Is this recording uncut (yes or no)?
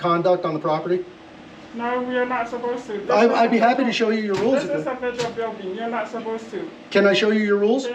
yes